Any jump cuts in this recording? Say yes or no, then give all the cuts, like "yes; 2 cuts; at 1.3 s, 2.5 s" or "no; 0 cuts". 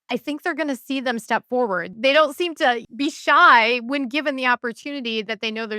yes; 2 cuts; at 1.9 s, 2.9 s